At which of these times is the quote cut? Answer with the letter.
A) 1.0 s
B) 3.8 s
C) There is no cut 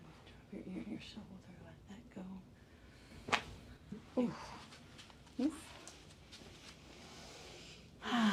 C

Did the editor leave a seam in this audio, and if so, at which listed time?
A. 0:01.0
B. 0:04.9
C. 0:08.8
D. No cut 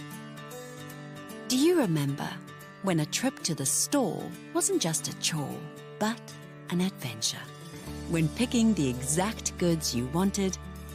A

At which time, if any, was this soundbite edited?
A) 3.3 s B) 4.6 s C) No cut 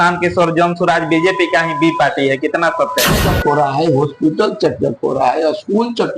A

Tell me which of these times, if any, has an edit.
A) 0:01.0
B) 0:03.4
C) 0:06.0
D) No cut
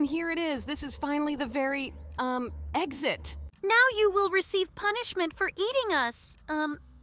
B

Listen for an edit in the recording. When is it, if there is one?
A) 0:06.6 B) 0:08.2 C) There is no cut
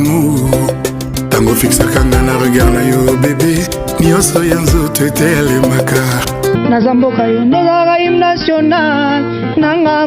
A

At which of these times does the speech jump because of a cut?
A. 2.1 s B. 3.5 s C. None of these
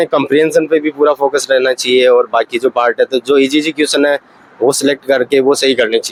C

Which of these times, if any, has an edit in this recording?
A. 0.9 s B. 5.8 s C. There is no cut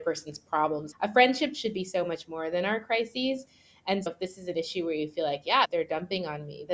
A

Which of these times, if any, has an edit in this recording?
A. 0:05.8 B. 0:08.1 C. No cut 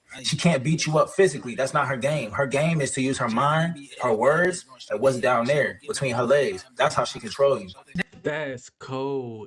B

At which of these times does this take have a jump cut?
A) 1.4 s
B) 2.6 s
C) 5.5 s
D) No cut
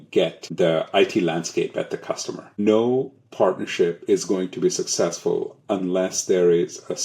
B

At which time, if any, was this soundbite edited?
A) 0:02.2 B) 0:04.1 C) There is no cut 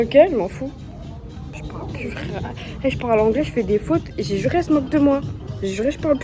C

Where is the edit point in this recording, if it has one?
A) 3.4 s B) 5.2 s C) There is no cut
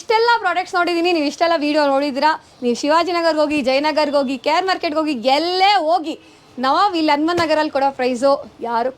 C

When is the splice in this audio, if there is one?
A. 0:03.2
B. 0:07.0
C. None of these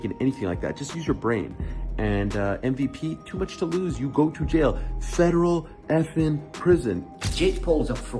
B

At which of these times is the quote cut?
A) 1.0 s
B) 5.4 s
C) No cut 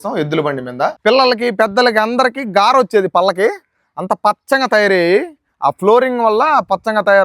A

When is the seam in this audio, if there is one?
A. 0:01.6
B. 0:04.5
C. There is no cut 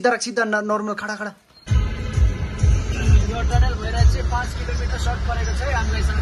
A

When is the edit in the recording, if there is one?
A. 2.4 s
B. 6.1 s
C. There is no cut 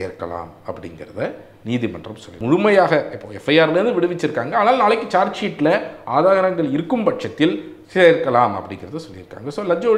A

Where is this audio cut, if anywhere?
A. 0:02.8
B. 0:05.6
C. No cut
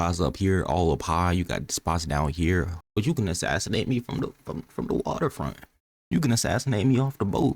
A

